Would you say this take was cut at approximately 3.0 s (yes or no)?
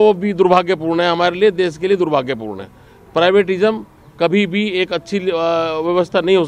no